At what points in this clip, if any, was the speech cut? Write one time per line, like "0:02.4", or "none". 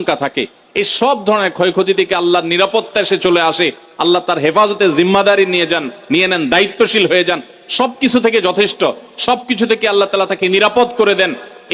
none